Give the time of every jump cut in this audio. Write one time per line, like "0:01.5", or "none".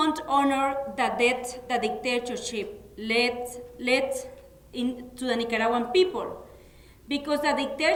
none